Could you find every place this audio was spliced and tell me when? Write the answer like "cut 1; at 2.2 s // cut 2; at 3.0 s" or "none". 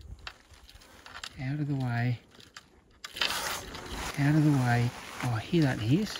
none